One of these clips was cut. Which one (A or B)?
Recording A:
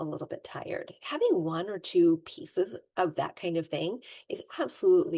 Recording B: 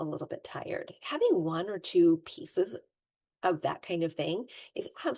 A